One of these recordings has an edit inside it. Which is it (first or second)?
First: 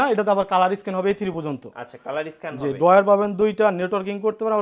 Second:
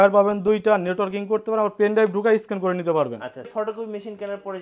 second